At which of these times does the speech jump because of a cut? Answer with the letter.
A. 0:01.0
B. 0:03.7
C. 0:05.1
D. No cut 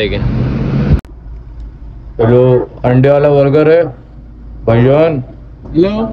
A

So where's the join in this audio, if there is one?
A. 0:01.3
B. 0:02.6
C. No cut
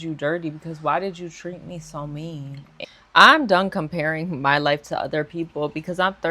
B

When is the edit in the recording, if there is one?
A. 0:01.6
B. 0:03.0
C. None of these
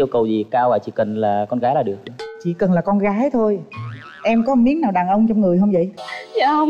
C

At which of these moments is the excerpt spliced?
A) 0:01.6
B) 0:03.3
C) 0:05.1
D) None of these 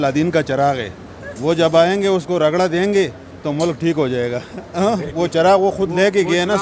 D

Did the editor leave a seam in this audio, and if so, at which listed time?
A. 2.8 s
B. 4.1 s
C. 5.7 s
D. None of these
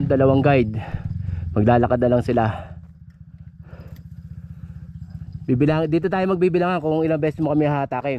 D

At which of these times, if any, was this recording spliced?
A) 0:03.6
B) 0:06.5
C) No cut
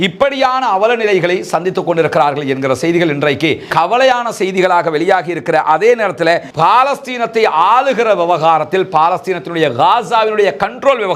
B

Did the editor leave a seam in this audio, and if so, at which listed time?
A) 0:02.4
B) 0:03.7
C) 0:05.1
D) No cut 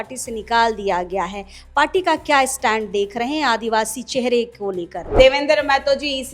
C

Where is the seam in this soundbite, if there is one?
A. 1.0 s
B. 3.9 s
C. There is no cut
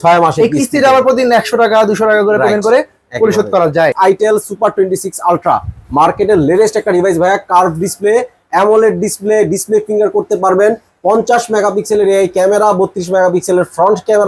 B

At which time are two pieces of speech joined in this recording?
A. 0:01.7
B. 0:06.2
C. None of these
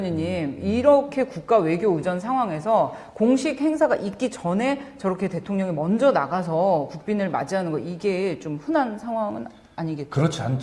A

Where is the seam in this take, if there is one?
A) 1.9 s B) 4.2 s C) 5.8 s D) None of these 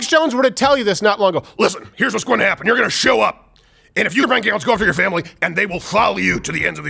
B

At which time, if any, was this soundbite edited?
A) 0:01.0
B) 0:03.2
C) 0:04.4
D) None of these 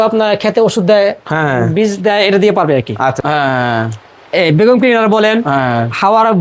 B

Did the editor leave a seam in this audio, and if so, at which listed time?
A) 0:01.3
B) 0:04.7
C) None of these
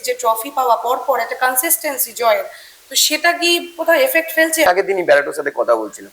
B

